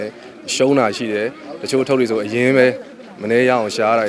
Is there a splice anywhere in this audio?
no; 0 cuts

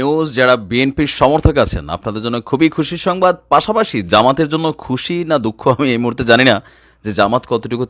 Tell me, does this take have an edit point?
no; 0 cuts

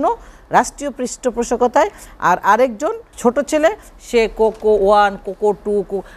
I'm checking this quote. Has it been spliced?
yes; 1 cut; at 3.1 s

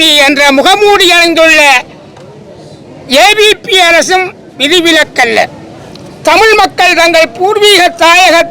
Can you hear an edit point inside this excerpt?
no; 0 cuts

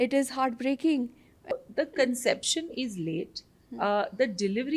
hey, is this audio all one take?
no; 1 cut; at 1.5 s

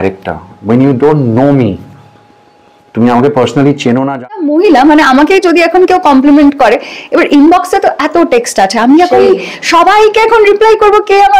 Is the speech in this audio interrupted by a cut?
yes; 1 cut; at 4.2 s

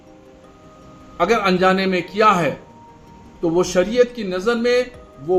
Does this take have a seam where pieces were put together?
no; 0 cuts

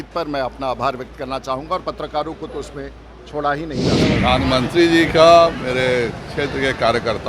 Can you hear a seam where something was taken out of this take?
yes; 1 cut; at 4.2 s

